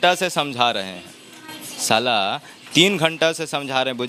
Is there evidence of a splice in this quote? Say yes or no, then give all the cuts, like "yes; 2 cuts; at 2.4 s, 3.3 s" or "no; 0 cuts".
no; 0 cuts